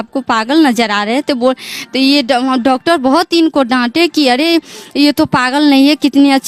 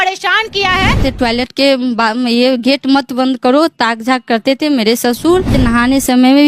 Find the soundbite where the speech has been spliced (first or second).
second